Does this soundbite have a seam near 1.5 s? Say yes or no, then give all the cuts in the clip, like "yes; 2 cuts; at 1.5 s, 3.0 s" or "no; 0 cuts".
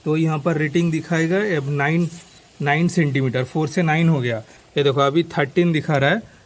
no; 1 cut; at 4.5 s